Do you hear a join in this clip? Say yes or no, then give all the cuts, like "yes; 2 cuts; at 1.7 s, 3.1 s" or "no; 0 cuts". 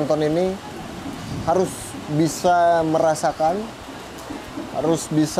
no; 0 cuts